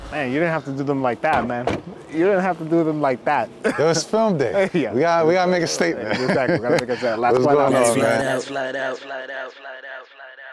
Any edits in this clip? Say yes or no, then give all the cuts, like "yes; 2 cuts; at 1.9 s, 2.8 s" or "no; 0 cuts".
no; 0 cuts